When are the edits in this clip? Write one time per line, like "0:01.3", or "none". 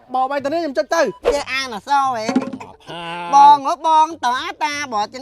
0:01.2